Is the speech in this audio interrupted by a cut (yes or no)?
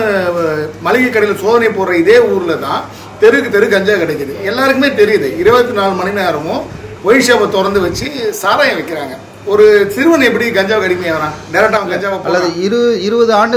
no